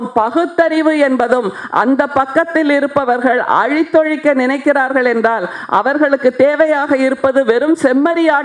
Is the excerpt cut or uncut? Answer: uncut